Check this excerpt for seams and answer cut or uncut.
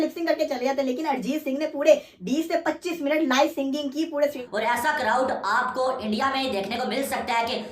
cut